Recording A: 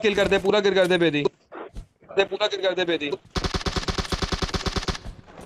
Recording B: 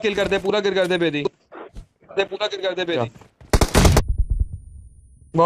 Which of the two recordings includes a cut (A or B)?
B